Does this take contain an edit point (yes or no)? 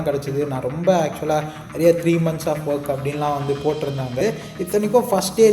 yes